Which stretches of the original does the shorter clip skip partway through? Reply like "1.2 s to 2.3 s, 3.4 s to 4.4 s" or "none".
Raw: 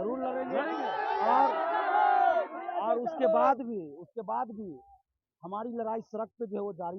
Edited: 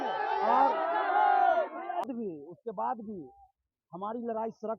2.8 s to 3.6 s